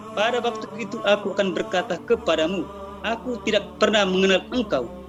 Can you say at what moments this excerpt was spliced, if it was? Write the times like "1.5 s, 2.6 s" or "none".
none